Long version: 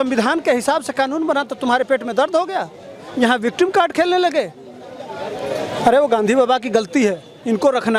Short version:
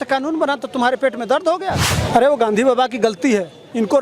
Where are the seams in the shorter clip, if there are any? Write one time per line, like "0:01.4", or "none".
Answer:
0:02.0